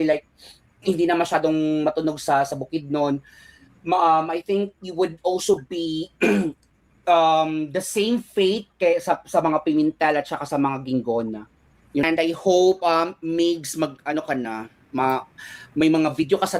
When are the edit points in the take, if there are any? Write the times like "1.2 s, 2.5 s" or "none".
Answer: 12.0 s